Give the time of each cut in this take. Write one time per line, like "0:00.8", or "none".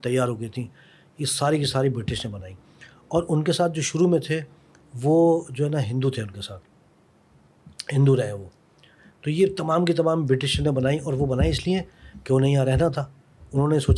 none